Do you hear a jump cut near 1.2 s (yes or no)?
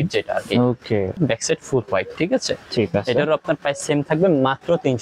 yes